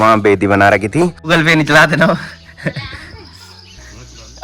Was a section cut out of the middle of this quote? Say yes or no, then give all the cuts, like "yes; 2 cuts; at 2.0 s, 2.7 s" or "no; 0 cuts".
yes; 1 cut; at 1.2 s